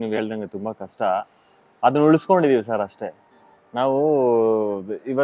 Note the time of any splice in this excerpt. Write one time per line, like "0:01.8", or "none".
none

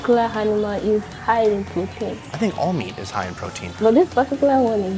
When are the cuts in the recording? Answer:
0:02.2
0:03.7

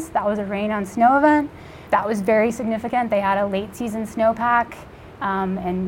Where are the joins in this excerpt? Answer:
none

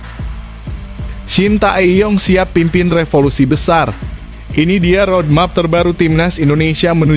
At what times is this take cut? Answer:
0:01.3

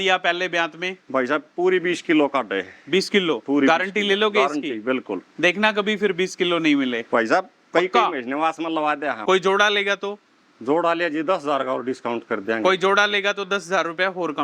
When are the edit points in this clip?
0:09.2

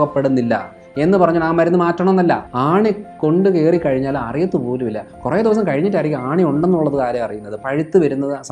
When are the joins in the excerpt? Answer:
0:02.5

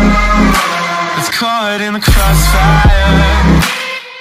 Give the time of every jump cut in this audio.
0:01.1

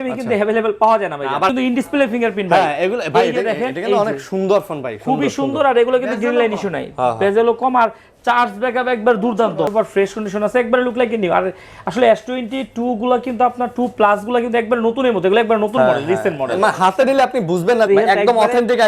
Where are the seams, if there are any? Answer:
0:01.5
0:09.7
0:17.9

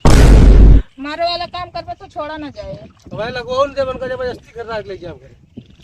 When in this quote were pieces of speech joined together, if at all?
0:00.9

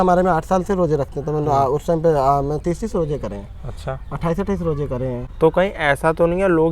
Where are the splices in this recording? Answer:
0:05.2

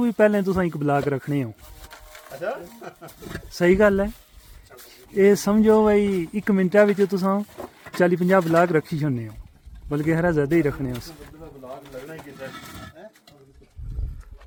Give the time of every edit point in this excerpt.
none

